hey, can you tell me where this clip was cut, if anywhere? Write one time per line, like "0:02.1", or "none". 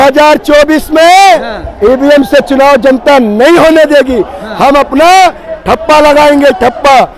none